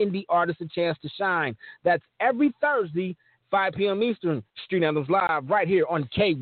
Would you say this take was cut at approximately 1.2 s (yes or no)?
no